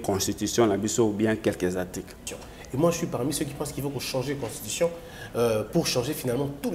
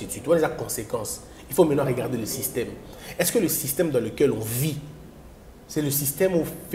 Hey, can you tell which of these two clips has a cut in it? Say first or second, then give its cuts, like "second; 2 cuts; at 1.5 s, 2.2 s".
first; 1 cut; at 2.1 s